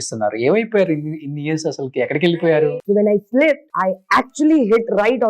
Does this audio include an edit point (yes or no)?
yes